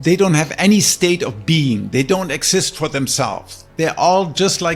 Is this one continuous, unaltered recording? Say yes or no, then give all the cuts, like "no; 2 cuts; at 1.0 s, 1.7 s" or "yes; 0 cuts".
yes; 0 cuts